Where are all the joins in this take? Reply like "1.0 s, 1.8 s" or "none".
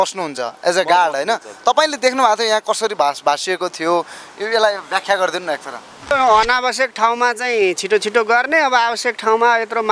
6.1 s